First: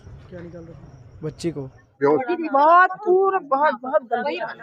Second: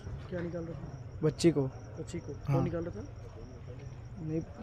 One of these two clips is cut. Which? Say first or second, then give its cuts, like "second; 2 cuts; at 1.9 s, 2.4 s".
first; 1 cut; at 1.8 s